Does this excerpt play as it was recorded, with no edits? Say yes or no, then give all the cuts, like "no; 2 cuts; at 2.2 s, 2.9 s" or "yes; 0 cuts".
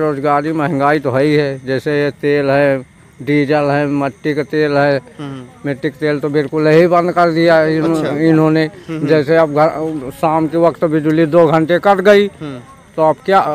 yes; 0 cuts